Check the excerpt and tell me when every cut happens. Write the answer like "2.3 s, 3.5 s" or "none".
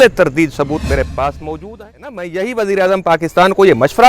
2.2 s